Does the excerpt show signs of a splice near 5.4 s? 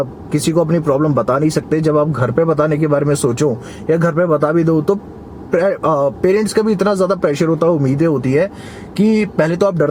no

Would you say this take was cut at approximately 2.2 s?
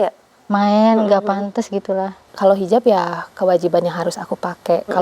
yes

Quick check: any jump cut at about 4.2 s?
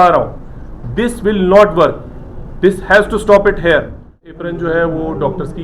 yes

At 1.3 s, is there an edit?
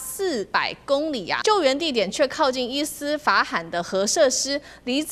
yes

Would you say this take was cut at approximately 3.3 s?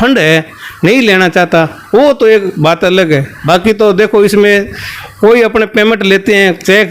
yes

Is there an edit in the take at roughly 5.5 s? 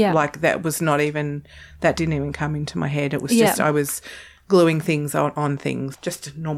yes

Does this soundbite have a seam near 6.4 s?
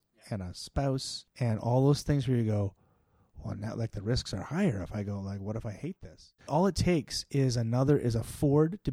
yes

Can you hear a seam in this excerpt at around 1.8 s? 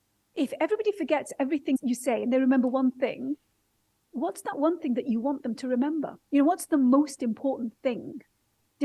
yes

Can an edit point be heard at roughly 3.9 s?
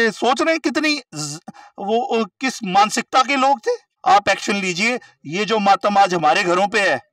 yes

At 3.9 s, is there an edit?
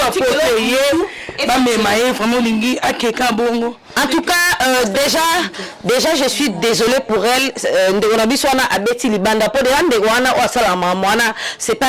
yes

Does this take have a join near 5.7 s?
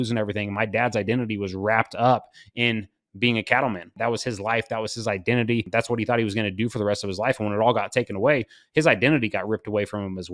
yes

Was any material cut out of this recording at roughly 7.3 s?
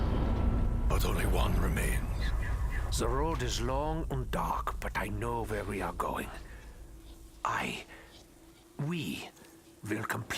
yes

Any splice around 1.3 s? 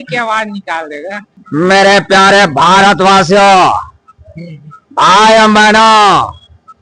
yes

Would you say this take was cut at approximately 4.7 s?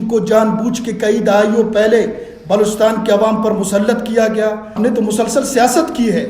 yes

